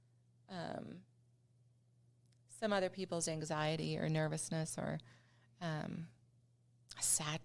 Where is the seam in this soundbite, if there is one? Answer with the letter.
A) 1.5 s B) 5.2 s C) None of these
C